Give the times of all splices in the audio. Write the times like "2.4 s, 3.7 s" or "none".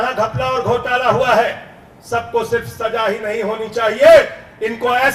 none